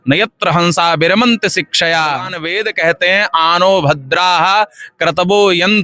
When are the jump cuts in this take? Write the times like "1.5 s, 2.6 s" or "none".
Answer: 2.4 s